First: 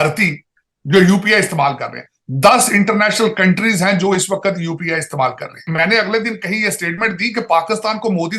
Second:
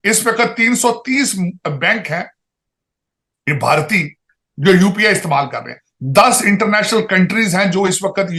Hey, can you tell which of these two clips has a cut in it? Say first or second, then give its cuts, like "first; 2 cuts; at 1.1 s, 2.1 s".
first; 1 cut; at 5.6 s